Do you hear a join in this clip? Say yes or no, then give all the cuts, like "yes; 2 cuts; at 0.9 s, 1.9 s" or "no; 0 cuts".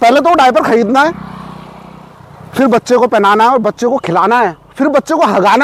no; 0 cuts